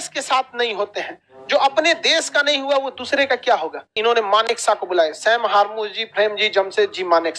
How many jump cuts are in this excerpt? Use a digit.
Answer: 1